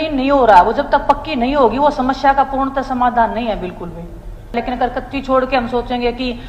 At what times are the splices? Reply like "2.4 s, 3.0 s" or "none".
4.5 s